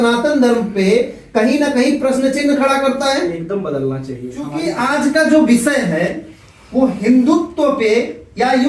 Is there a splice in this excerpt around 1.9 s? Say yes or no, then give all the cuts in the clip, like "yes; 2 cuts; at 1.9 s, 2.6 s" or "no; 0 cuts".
no; 1 cut; at 4.7 s